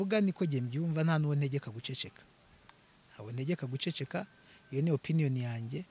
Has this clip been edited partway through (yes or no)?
no